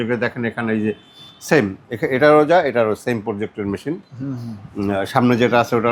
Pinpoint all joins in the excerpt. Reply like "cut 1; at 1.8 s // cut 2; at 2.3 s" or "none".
none